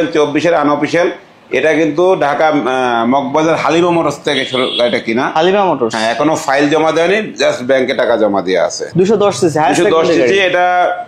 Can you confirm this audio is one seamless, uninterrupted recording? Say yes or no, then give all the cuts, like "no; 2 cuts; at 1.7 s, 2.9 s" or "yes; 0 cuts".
no; 1 cut; at 8.8 s